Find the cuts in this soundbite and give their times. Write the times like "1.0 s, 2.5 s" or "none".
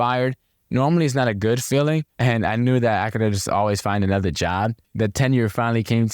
2.1 s, 4.8 s